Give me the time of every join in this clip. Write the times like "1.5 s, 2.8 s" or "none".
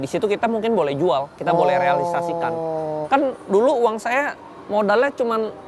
3.0 s